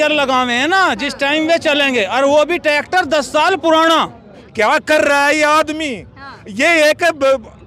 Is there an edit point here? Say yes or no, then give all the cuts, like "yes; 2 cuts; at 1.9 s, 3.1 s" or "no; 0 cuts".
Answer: yes; 1 cut; at 4.4 s